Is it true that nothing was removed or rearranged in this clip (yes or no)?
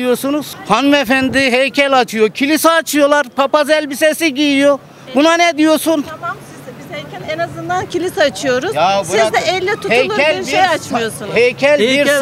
yes